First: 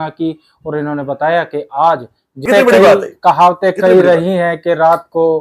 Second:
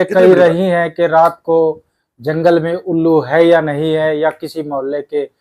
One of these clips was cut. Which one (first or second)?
first